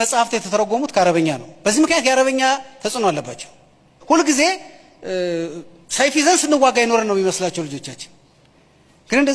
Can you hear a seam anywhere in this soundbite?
yes; 1 cut; at 3.9 s

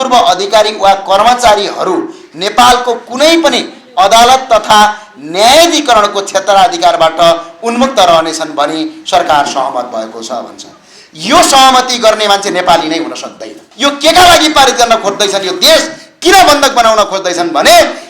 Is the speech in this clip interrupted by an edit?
yes; 1 cut; at 13.7 s

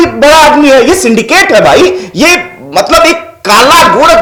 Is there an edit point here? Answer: no; 0 cuts

